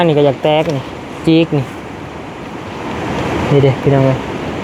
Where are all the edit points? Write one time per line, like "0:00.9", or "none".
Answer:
none